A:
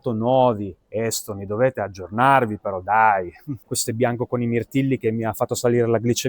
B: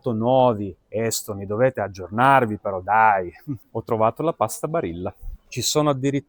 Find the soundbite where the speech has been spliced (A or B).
A